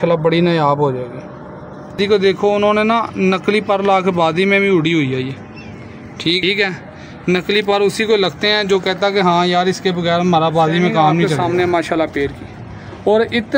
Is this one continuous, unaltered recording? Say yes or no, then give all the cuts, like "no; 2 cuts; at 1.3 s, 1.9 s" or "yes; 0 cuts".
no; 3 cuts; at 1.9 s, 6.4 s, 11.3 s